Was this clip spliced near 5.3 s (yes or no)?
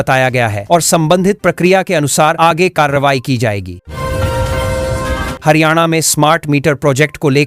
yes